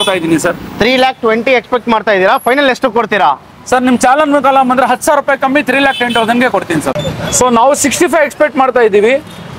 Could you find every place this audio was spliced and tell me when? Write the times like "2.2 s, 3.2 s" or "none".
6.9 s